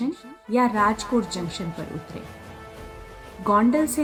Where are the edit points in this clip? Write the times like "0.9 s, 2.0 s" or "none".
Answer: none

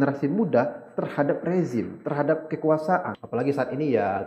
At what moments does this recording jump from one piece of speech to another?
3.2 s

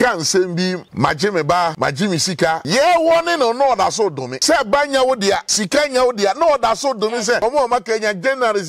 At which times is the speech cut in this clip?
0.9 s, 2.3 s, 4.3 s, 5.5 s, 7.4 s

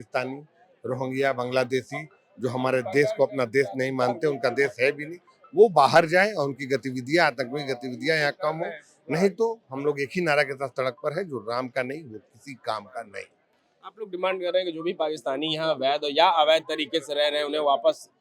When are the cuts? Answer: none

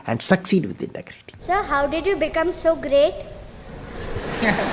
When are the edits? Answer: 1.4 s

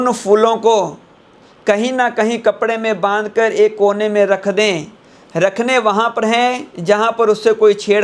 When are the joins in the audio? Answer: none

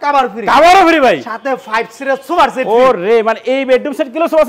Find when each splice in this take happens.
none

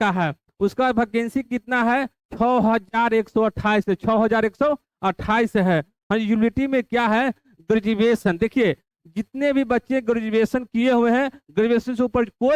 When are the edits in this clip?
none

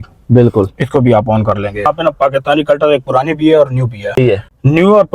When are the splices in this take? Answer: 1.9 s, 4.2 s

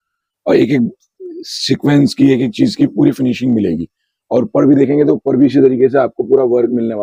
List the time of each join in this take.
none

